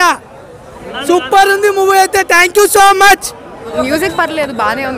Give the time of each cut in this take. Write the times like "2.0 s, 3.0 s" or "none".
3.6 s